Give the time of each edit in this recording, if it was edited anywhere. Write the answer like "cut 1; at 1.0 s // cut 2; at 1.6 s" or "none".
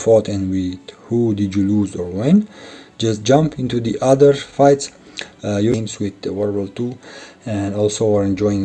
cut 1; at 5.7 s